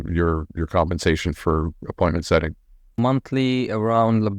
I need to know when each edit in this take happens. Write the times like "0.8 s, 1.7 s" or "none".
3.0 s